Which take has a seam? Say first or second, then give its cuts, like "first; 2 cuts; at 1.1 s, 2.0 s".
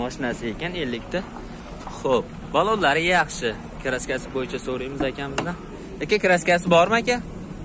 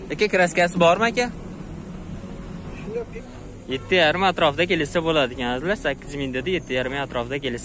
second; 1 cut; at 3.1 s